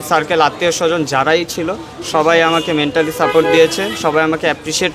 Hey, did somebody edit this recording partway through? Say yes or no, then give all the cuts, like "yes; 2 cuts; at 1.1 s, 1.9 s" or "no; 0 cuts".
no; 0 cuts